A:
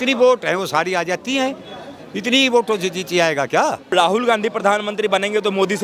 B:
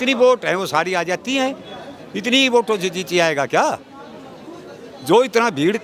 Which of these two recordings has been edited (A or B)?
A